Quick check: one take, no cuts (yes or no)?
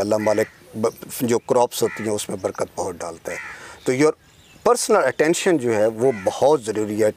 yes